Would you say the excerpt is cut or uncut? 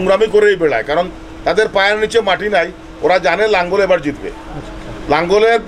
uncut